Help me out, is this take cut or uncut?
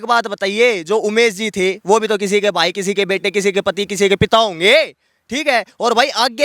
uncut